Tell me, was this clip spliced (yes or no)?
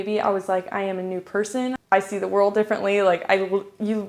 yes